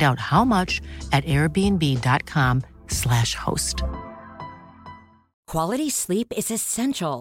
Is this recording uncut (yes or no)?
no